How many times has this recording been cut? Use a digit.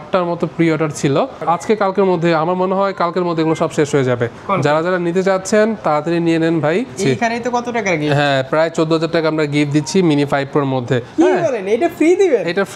4